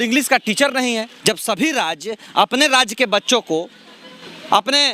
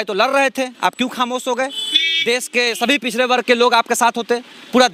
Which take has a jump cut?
first; 1 cut; at 1.1 s

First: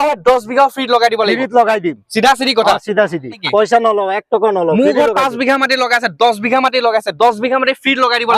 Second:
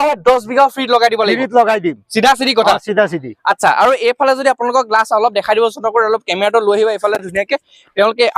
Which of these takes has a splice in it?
first; 1 cut; at 3.4 s

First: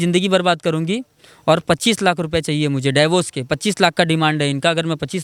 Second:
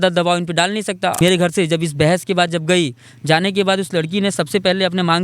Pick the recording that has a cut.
second; 1 cut; at 1.2 s

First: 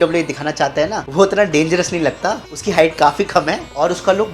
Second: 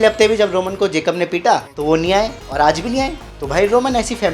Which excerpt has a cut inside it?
first; 1 cut; at 1.0 s

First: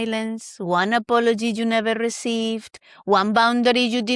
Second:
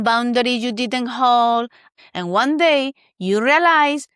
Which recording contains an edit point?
second; 1 cut; at 1.9 s

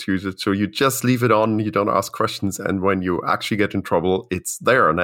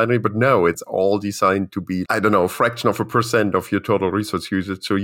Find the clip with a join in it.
second; 2 cuts; at 0.8 s, 2.0 s

